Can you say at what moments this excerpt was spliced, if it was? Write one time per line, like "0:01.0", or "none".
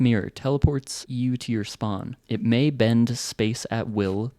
0:01.0
0:02.1